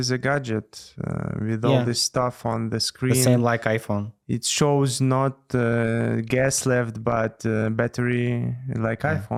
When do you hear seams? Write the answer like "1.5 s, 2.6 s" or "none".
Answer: none